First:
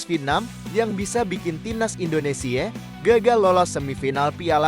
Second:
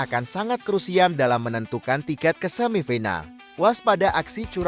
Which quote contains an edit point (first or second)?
second